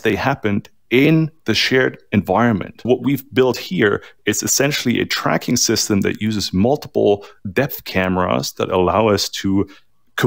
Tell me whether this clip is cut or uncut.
cut